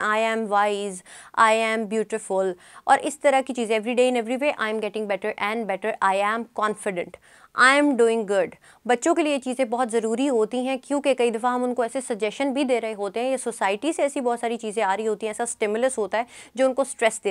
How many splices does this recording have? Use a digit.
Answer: 0